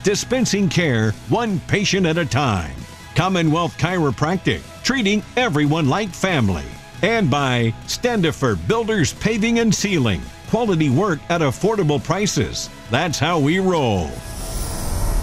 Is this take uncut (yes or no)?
no